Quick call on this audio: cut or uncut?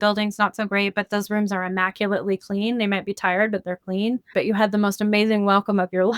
cut